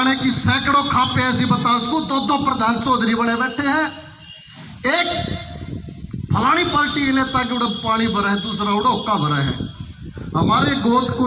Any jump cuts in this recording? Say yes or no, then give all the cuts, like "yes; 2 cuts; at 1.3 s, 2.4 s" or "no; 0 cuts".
no; 0 cuts